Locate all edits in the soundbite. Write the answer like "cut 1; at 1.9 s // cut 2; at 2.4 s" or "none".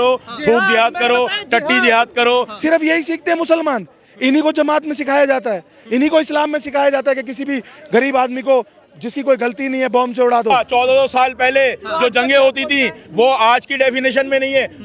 cut 1; at 2.5 s // cut 2; at 10.5 s